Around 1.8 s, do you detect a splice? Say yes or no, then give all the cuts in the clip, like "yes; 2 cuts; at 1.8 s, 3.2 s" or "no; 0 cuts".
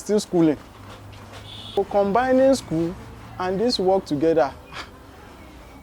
yes; 1 cut; at 1.8 s